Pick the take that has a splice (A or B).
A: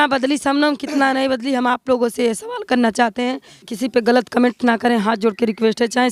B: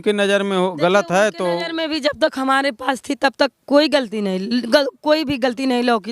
A